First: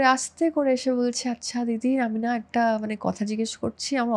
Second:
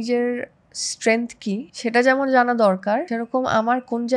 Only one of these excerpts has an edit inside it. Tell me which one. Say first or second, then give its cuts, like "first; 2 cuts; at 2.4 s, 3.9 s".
second; 2 cuts; at 1.7 s, 3.1 s